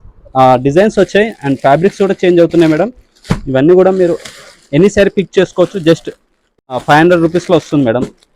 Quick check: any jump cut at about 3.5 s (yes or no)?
no